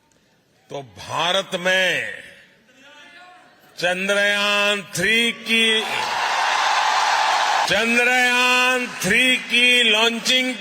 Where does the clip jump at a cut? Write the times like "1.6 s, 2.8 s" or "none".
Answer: 7.7 s